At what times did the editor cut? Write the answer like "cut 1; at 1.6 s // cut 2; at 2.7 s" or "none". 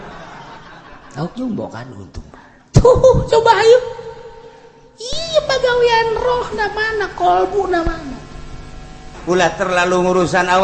cut 1; at 9.1 s